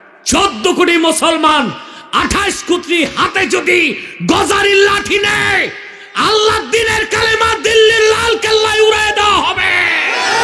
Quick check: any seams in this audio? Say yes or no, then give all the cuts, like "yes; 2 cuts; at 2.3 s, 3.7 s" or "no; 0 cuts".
no; 0 cuts